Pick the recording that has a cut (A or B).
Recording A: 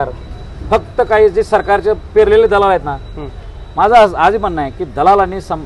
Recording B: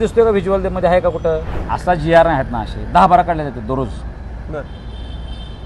B